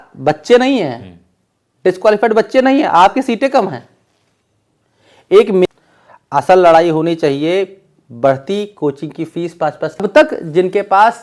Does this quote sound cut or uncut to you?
cut